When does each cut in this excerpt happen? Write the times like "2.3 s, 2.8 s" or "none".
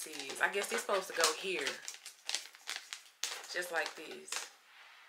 none